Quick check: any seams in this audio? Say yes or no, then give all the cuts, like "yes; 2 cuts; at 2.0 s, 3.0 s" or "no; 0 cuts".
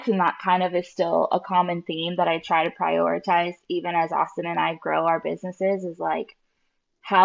no; 0 cuts